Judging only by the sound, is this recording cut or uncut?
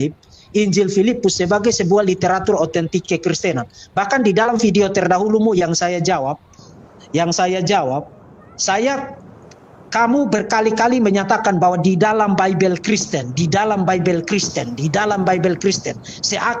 uncut